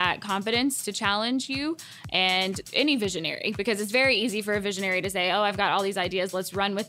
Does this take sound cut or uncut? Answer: cut